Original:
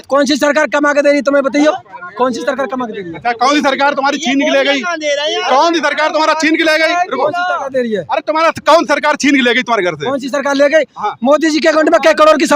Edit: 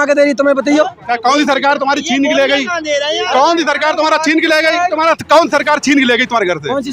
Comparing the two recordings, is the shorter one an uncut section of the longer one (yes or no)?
no